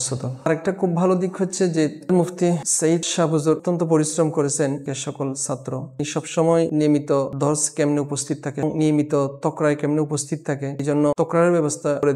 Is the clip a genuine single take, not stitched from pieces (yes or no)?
yes